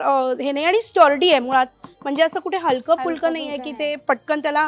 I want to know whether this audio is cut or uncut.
uncut